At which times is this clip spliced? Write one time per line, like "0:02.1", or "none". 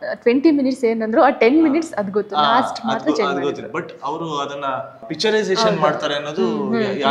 0:05.0